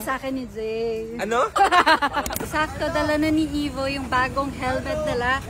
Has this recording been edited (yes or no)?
yes